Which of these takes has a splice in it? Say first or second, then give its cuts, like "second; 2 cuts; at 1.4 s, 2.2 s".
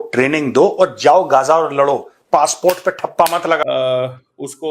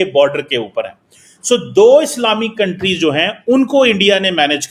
first; 1 cut; at 3.6 s